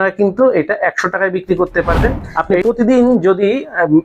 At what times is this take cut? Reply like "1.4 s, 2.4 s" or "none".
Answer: 2.2 s